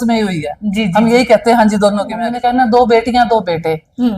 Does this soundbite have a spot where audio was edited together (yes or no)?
yes